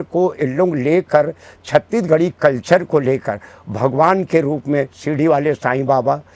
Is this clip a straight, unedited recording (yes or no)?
yes